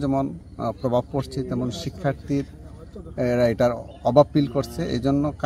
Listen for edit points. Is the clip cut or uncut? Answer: uncut